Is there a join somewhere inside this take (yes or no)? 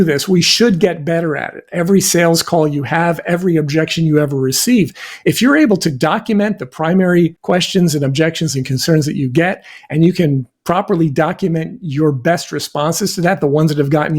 yes